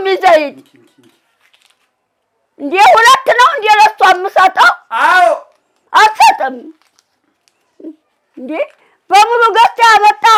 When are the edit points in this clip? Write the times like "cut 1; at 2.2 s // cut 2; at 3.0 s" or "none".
none